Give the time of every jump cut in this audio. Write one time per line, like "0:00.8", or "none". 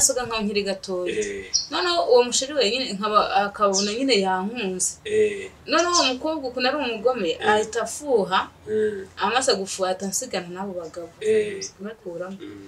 0:11.7